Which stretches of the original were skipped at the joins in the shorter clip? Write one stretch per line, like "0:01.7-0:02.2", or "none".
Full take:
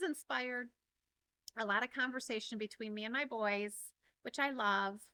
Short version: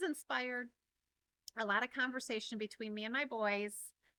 none